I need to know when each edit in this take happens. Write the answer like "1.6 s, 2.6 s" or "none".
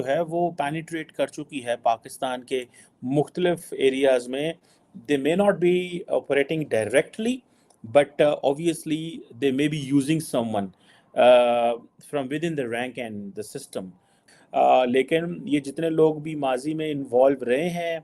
none